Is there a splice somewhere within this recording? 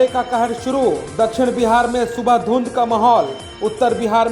no; 0 cuts

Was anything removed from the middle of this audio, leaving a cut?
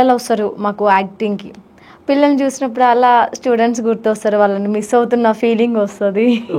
no; 0 cuts

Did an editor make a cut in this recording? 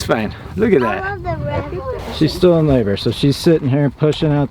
yes; 1 cut; at 2.0 s

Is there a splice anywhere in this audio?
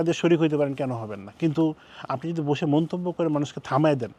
no; 0 cuts

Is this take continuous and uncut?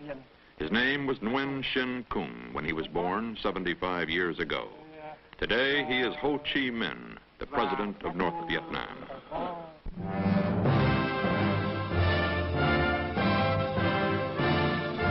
yes; 0 cuts

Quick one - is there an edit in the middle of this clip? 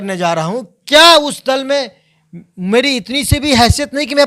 no; 0 cuts

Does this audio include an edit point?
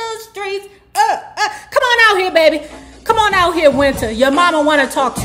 no; 0 cuts

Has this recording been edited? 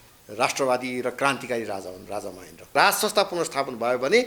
yes; 1 cut; at 2.7 s

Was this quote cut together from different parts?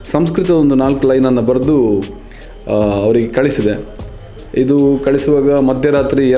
no; 0 cuts

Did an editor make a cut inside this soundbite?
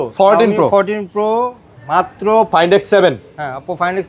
yes; 1 cut; at 2.5 s

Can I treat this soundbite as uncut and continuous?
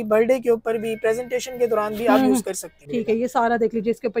no; 1 cut; at 2.7 s

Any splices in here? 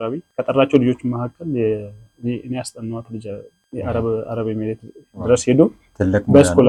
no; 0 cuts

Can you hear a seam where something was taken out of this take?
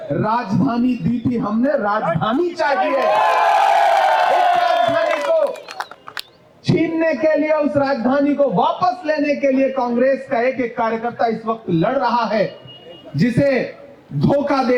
no; 0 cuts

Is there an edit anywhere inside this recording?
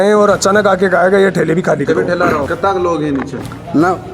yes; 1 cut; at 2.5 s

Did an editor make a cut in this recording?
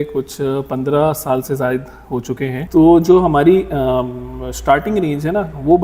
yes; 1 cut; at 2.6 s

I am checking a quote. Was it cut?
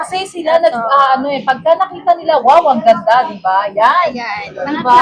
no; 0 cuts

